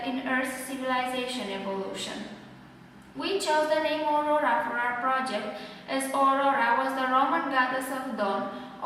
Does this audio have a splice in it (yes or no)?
no